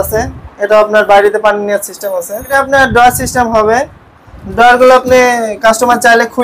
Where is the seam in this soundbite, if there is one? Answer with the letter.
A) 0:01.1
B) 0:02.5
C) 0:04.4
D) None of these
B